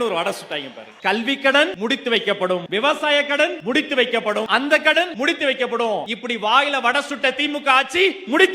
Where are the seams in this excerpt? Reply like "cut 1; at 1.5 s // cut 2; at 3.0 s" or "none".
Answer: cut 1; at 1.7 s // cut 2; at 3.6 s // cut 3; at 4.5 s // cut 4; at 5.1 s // cut 5; at 6.1 s